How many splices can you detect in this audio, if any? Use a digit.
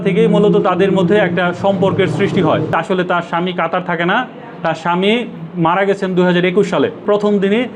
2